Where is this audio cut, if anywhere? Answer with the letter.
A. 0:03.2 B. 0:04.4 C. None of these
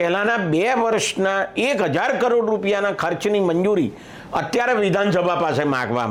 C